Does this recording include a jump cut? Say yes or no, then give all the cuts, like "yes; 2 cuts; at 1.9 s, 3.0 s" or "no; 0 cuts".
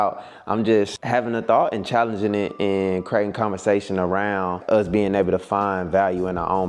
yes; 2 cuts; at 1.0 s, 4.6 s